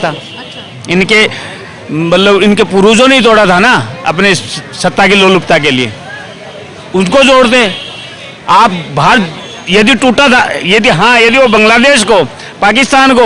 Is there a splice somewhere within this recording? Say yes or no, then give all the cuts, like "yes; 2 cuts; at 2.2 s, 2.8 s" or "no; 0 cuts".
no; 0 cuts